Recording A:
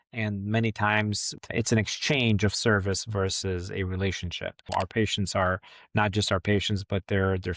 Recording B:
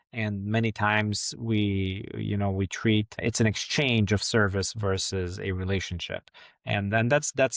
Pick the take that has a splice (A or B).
A